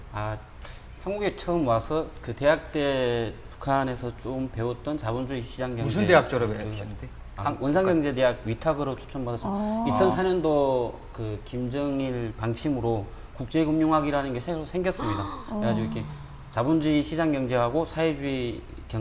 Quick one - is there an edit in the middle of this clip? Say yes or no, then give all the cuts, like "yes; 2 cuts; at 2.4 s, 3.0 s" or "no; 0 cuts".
no; 0 cuts